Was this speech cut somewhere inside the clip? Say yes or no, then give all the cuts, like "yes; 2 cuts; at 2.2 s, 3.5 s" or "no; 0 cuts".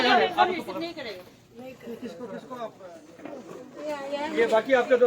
yes; 1 cut; at 2.8 s